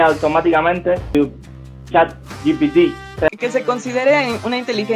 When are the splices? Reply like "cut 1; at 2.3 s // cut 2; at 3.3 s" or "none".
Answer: cut 1; at 1.1 s // cut 2; at 3.3 s

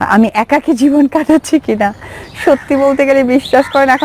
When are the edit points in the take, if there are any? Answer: none

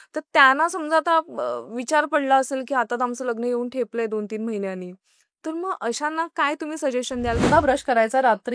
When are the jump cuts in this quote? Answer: cut 1; at 7.4 s

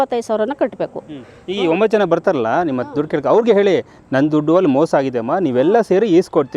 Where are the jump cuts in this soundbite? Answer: none

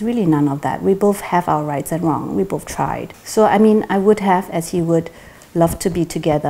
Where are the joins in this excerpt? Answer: cut 1; at 3.1 s

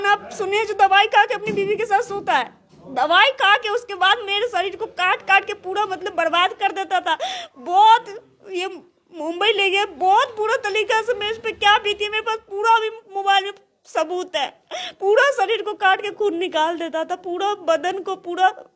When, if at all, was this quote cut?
none

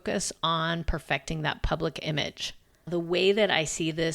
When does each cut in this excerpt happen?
cut 1; at 2.9 s

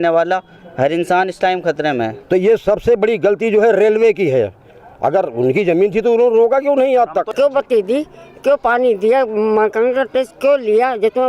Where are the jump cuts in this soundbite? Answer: cut 1; at 2.2 s // cut 2; at 7.3 s

